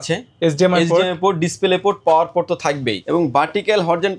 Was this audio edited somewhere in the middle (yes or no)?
yes